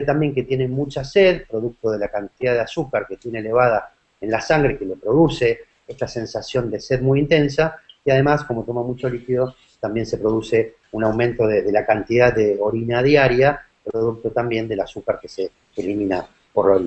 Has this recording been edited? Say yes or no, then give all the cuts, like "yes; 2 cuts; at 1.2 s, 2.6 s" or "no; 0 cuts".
no; 0 cuts